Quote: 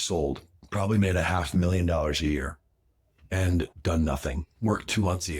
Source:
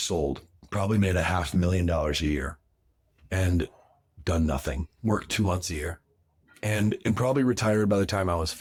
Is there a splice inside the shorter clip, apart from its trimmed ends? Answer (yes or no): yes